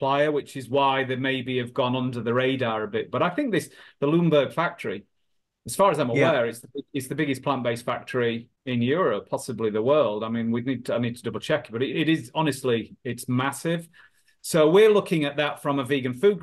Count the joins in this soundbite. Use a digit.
1